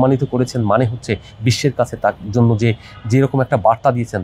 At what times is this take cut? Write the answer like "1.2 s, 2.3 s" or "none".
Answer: none